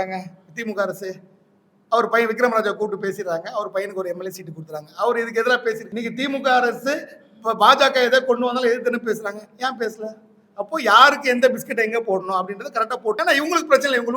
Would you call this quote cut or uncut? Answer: cut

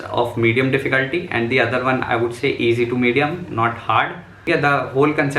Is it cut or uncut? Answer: cut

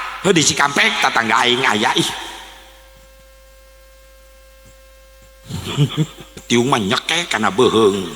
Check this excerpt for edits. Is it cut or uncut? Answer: cut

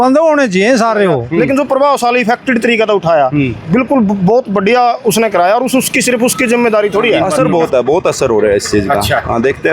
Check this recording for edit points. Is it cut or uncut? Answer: cut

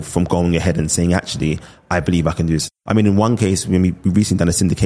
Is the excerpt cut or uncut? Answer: cut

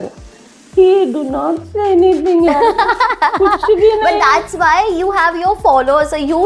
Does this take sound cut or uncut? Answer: uncut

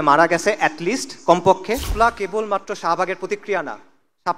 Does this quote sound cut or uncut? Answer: cut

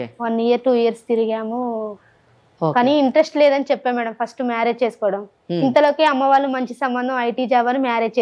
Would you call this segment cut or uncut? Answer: uncut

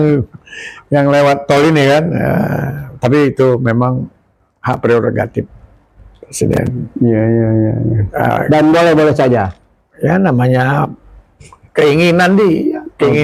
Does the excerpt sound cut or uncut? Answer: uncut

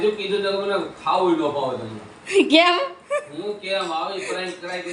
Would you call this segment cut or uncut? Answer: uncut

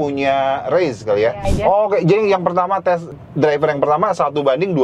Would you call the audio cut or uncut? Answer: cut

